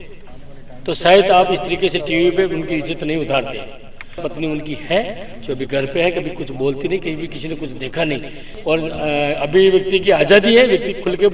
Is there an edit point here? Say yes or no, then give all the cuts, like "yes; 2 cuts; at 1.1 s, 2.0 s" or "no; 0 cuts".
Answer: yes; 2 cuts; at 4.2 s, 8.5 s